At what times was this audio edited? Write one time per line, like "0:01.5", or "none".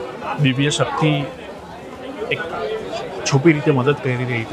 none